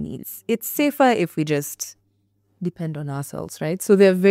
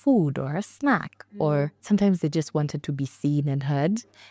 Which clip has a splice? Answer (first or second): second